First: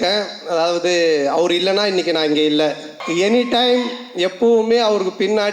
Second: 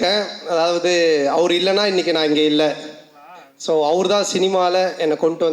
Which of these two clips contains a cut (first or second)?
first